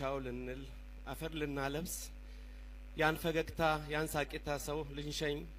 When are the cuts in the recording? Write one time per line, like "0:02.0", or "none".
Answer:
none